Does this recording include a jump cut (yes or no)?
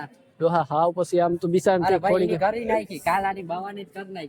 no